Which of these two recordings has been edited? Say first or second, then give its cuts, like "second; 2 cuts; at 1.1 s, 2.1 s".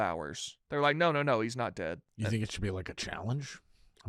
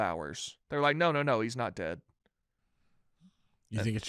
first; 1 cut; at 2.1 s